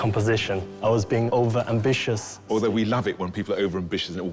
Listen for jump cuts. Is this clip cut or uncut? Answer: cut